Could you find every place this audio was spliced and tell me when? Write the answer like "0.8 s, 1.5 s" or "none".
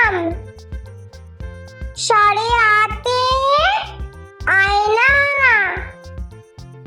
5.9 s